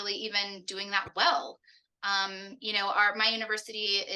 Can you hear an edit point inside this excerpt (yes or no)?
no